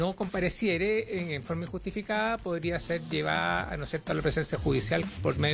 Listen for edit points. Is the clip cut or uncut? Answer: uncut